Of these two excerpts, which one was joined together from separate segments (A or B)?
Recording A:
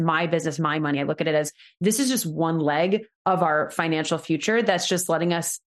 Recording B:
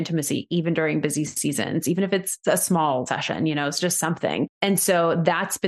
B